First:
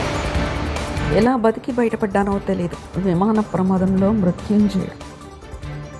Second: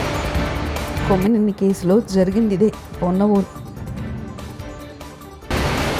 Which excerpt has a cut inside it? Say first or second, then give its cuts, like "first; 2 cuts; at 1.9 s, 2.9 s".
first; 1 cut; at 1.0 s